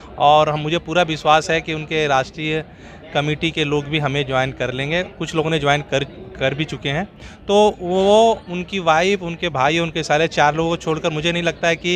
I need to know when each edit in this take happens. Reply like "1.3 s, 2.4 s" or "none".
none

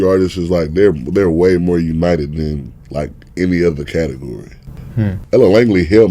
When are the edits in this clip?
5.1 s

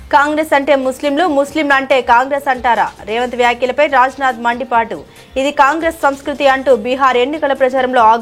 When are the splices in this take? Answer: none

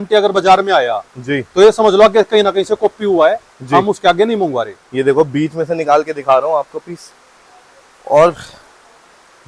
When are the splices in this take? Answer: none

